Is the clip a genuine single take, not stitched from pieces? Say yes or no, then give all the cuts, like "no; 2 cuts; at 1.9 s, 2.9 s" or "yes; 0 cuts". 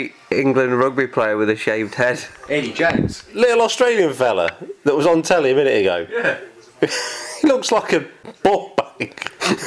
no; 3 cuts; at 2.3 s, 3.2 s, 8.2 s